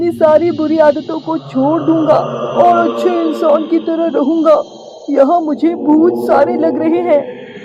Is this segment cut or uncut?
uncut